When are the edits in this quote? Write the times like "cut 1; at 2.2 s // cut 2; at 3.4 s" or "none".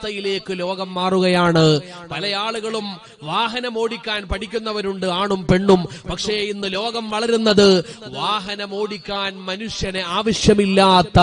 none

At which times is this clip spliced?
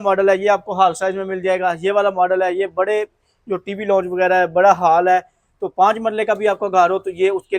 none

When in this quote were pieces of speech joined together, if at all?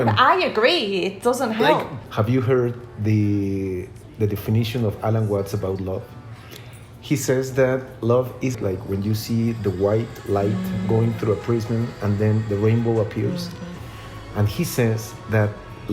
cut 1; at 2.0 s // cut 2; at 8.6 s

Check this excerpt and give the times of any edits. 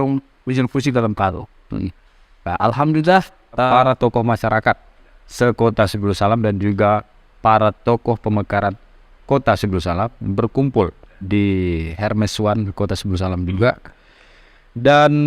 cut 1; at 3.7 s

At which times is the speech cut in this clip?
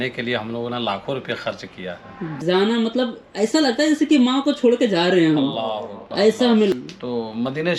cut 1; at 2.4 s // cut 2; at 6.7 s

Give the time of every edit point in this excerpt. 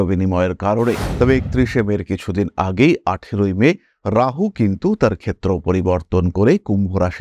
cut 1; at 1.1 s

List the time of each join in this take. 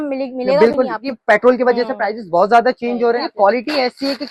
cut 1; at 1.1 s // cut 2; at 3.2 s

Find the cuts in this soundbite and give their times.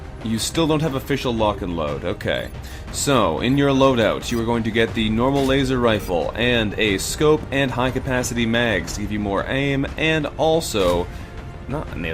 none

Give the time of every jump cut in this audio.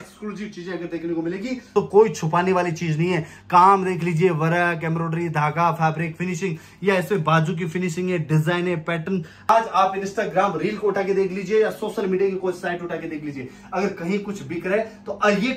cut 1; at 1.7 s // cut 2; at 7.6 s // cut 3; at 9.5 s

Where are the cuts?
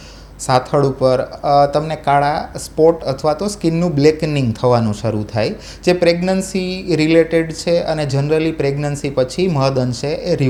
none

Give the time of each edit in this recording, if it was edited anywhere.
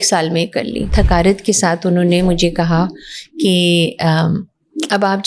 cut 1; at 0.9 s

